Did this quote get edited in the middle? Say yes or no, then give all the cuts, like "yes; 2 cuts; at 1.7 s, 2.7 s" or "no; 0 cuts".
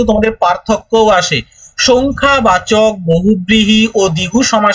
no; 0 cuts